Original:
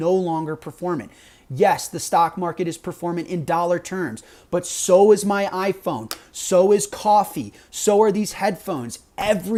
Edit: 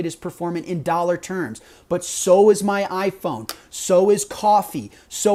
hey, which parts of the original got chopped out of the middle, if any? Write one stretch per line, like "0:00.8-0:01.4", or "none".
none